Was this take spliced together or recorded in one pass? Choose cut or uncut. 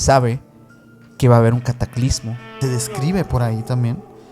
cut